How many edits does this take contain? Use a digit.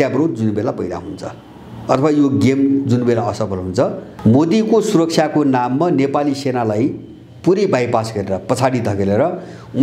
1